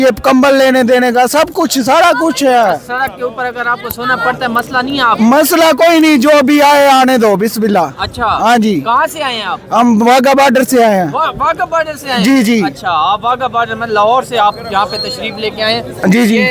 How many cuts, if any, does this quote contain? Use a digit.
0